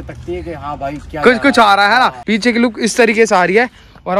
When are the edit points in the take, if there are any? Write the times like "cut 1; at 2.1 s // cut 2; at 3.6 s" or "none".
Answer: cut 1; at 2.2 s